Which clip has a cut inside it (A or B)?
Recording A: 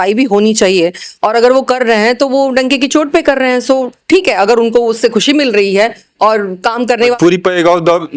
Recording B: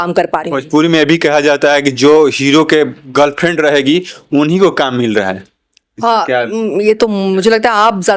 A